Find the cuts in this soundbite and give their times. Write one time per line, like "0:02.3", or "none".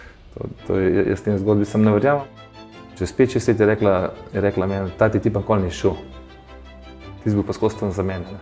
0:02.2